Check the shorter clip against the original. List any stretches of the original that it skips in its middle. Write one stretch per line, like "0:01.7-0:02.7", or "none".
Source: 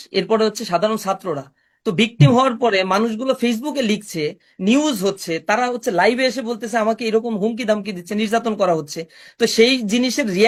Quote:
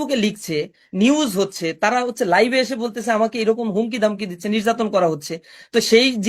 none